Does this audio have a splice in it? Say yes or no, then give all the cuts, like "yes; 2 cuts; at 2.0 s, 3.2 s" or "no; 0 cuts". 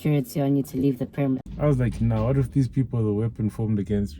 yes; 1 cut; at 1.5 s